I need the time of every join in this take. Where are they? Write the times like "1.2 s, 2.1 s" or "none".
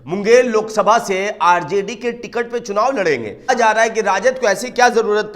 3.5 s